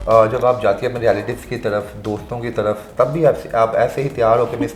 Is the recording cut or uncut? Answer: uncut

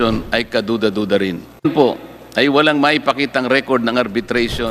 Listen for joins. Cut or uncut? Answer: uncut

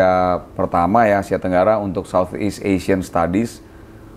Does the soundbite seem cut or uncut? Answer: uncut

